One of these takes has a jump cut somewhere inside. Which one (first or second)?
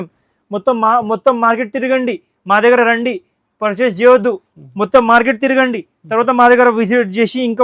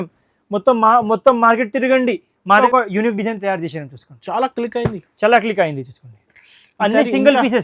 second